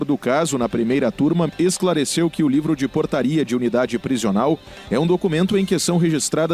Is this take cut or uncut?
cut